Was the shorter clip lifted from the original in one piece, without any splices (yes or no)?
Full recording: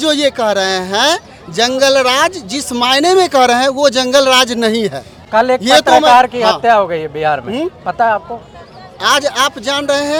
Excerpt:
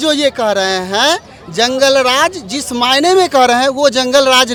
yes